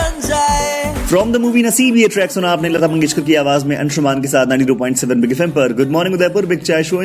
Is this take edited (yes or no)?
yes